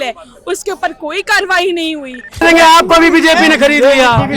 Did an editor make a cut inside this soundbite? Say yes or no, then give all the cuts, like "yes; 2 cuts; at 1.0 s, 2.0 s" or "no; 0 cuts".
yes; 1 cut; at 2.4 s